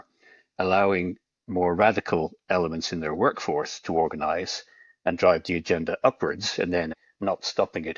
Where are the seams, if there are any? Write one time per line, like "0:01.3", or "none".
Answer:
0:07.0